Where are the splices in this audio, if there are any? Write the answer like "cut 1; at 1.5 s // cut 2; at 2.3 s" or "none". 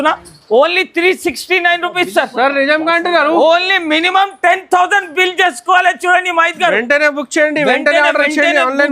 none